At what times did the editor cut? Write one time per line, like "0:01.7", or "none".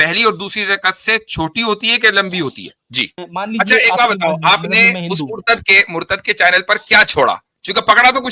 0:03.2